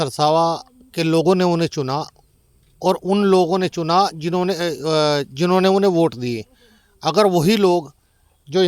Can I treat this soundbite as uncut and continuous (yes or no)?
yes